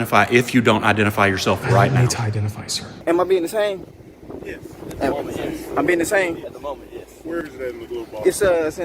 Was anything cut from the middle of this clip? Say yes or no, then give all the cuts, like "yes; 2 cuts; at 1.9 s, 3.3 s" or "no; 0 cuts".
yes; 1 cut; at 2.8 s